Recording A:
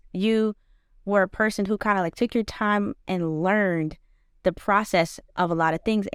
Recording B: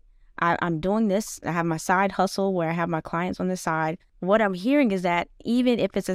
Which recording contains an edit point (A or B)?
B